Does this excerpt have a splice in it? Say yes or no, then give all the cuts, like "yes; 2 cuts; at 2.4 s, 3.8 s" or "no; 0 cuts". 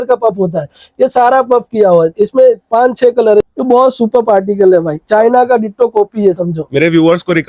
yes; 1 cut; at 3.4 s